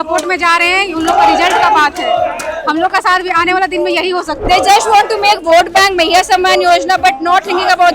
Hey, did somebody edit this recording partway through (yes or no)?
yes